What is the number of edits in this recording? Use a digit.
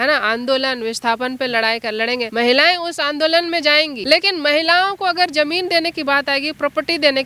2